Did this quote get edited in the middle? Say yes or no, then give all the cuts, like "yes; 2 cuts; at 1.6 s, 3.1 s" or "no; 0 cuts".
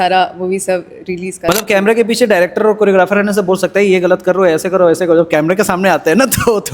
yes; 1 cut; at 1.5 s